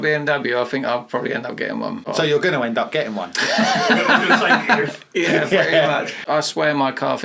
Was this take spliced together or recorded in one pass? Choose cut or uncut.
cut